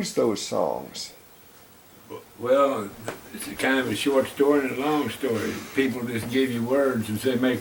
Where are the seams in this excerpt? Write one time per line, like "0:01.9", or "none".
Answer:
none